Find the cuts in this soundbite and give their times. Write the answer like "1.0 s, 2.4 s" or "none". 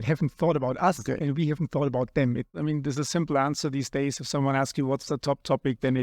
2.5 s